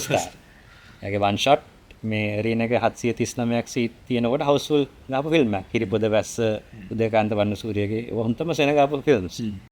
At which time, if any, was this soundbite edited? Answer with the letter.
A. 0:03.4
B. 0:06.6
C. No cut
C